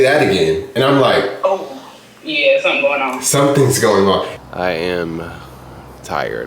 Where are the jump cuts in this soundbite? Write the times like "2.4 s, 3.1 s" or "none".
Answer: 4.3 s